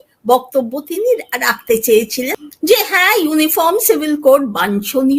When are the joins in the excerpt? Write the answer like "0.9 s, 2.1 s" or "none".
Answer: 2.3 s